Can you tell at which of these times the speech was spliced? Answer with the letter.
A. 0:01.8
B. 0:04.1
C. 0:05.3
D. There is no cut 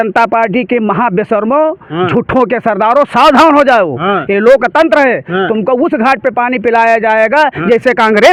D